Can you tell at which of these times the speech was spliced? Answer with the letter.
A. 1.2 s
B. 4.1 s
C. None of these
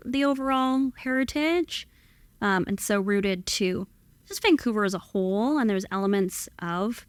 C